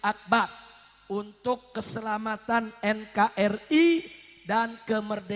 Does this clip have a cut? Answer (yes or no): no